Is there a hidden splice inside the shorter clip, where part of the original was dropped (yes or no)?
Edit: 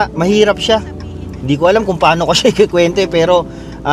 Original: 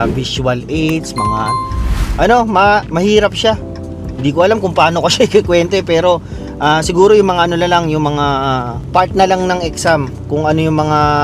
no